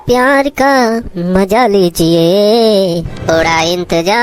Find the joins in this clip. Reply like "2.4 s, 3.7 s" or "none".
none